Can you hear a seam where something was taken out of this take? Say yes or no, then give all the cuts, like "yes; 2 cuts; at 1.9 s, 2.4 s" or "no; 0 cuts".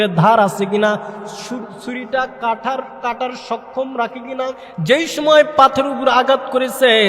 yes; 1 cut; at 4.7 s